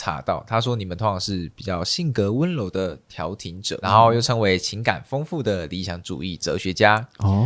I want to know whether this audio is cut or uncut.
uncut